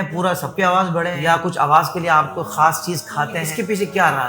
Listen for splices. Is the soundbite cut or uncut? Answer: cut